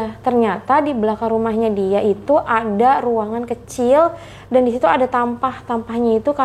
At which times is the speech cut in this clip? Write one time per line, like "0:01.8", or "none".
none